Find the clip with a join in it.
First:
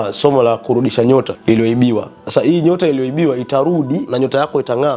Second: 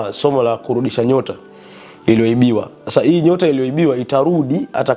first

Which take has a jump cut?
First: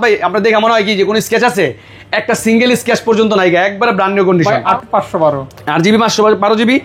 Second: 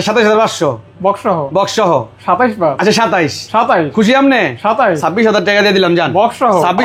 first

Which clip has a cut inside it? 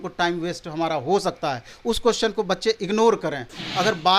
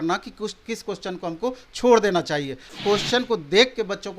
second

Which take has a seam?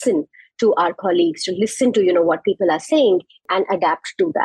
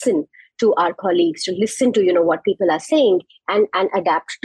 first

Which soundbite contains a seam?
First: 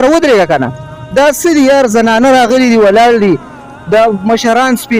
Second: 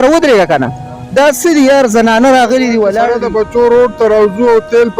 second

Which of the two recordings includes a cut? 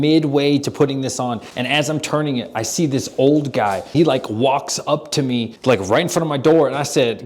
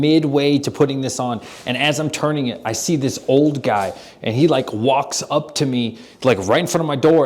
first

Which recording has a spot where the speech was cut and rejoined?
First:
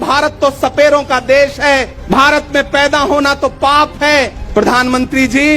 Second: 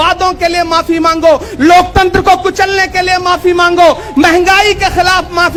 first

